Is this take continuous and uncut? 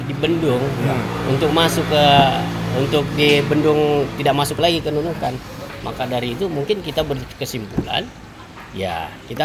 yes; 0 cuts

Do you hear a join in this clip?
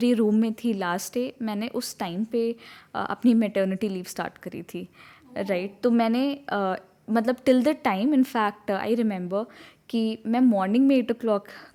no; 0 cuts

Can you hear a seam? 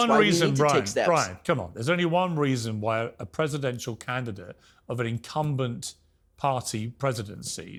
no; 0 cuts

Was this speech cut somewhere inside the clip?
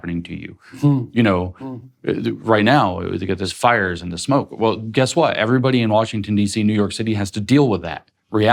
yes; 1 cut; at 3.5 s

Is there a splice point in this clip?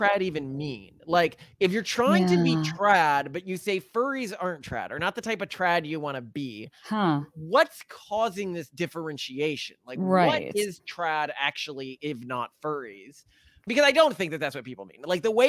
no; 0 cuts

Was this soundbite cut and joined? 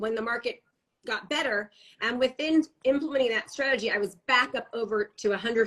no; 0 cuts

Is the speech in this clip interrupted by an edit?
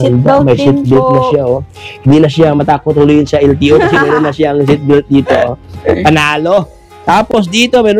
no; 0 cuts

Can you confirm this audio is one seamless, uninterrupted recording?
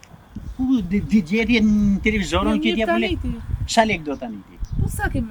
yes; 0 cuts

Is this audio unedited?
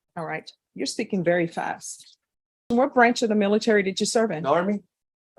no; 1 cut; at 2.7 s

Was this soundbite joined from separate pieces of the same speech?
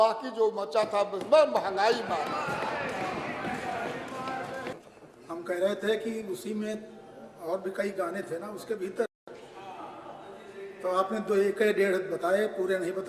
yes; 1 cut; at 4.7 s

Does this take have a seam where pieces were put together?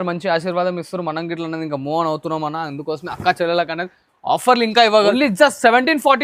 yes; 1 cut; at 5.1 s

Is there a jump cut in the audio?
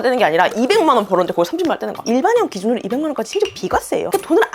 yes; 1 cut; at 2.0 s

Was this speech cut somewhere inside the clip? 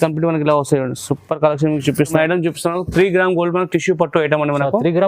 yes; 1 cut; at 2.1 s

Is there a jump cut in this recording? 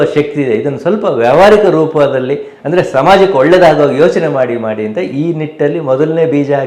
no; 0 cuts

